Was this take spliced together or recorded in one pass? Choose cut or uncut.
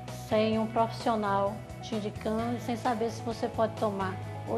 uncut